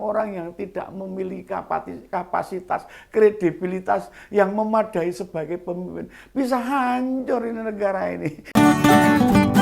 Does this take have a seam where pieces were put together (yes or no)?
yes